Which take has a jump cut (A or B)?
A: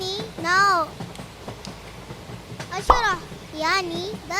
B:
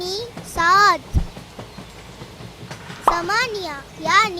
B